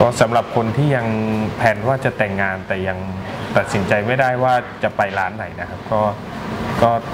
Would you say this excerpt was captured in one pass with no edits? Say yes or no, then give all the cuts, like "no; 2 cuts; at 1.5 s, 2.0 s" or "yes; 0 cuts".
yes; 0 cuts